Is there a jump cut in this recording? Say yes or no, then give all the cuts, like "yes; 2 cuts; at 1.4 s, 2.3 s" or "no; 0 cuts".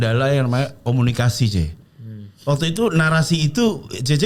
no; 0 cuts